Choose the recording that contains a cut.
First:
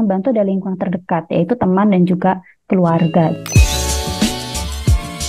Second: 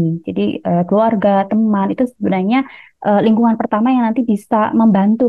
first; 1 cut; at 3.4 s

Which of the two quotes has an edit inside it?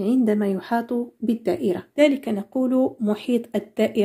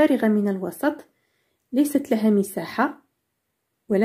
first; 1 cut; at 1.9 s

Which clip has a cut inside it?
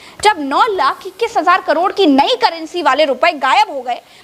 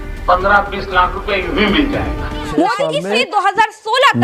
second; 1 cut; at 3.0 s

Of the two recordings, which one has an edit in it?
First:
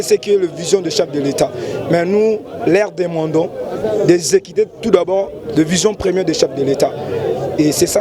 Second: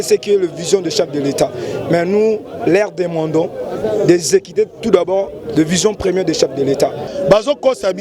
second; 1 cut; at 7.0 s

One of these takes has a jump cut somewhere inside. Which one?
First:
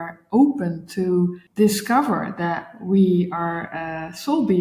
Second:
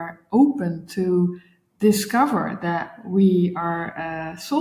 first; 1 cut; at 1.4 s

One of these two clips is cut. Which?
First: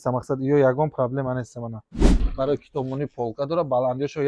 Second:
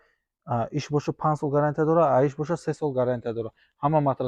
first; 1 cut; at 2.2 s

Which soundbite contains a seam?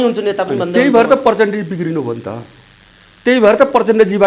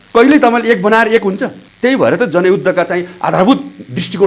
second; 1 cut; at 1.6 s

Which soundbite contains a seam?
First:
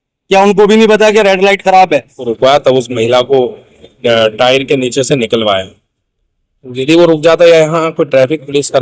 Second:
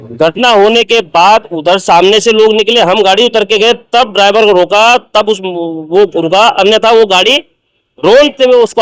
first; 1 cut; at 2.1 s

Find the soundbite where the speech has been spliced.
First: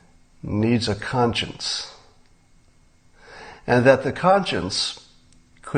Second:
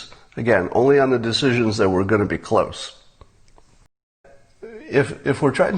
second; 1 cut; at 4.3 s

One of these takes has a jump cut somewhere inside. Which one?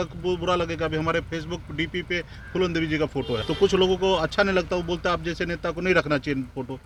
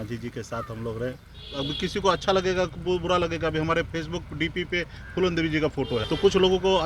second; 1 cut; at 1.4 s

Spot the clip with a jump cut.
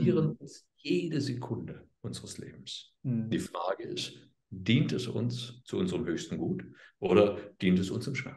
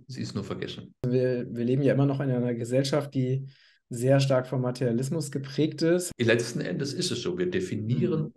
second; 2 cuts; at 1.0 s, 6.1 s

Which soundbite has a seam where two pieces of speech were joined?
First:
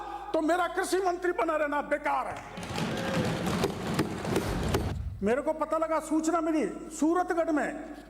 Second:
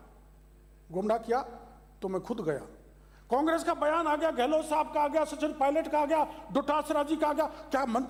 first; 1 cut; at 4.9 s

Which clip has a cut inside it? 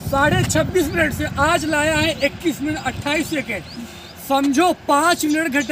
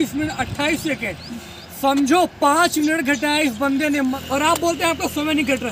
second; 1 cut; at 4.2 s

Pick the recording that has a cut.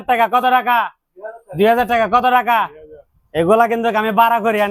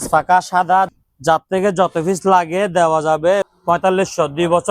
second; 2 cuts; at 0.9 s, 3.5 s

